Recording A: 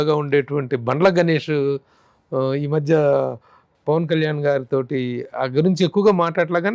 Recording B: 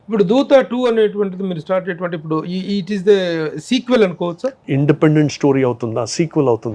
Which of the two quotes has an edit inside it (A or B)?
B